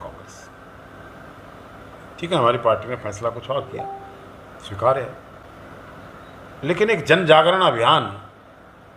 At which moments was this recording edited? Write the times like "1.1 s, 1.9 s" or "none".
5.4 s